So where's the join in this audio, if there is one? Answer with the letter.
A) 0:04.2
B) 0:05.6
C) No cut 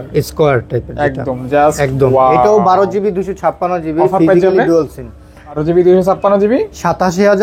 B